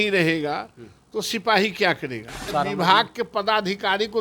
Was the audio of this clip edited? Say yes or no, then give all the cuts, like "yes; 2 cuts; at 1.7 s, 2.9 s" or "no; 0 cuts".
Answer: yes; 1 cut; at 2.5 s